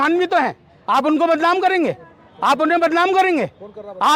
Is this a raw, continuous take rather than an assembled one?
yes; 0 cuts

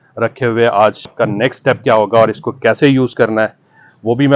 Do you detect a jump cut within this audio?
yes; 1 cut; at 1.1 s

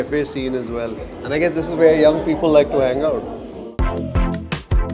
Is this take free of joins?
no; 1 cut; at 3.7 s

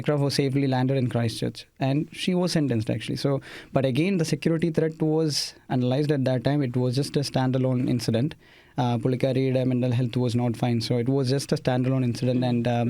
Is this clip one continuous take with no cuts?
yes; 0 cuts

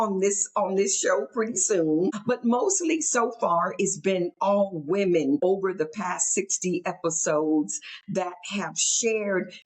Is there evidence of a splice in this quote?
yes; 2 cuts; at 2.2 s, 5.4 s

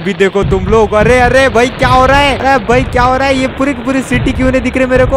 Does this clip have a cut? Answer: yes; 1 cut; at 2.4 s

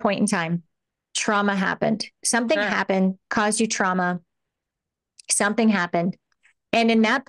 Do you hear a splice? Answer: no; 0 cuts

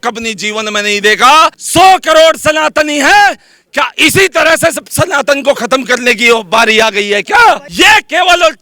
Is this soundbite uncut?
no; 2 cuts; at 1.6 s, 7.6 s

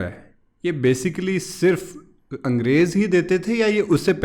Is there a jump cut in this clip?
no; 0 cuts

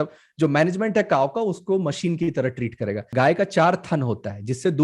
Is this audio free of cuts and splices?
no; 1 cut; at 3.1 s

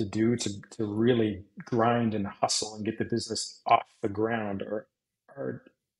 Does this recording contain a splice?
no; 0 cuts

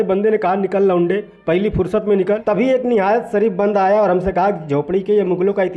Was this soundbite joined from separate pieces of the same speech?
yes; 1 cut; at 2.4 s

